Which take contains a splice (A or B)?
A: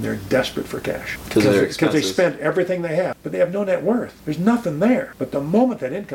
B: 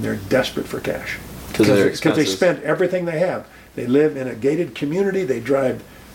A